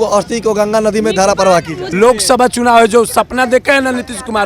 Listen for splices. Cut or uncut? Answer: cut